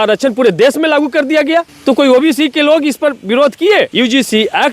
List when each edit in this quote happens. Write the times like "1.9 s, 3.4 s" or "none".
1.7 s, 3.9 s